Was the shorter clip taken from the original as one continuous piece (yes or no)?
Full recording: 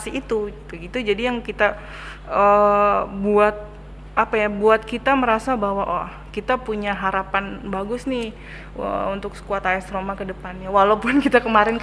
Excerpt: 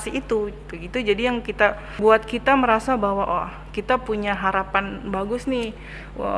no